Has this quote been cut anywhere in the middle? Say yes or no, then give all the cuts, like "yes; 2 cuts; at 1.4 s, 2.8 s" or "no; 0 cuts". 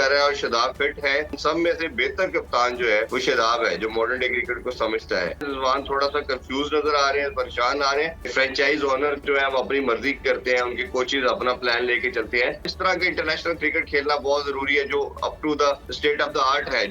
yes; 6 cuts; at 1.4 s, 3.1 s, 5.5 s, 8.3 s, 12.7 s, 15.9 s